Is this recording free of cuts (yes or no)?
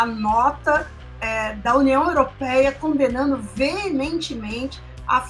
yes